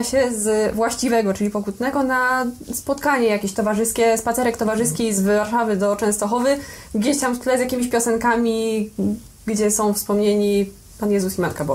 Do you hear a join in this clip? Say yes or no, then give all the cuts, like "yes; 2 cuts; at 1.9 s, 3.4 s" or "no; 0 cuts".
no; 0 cuts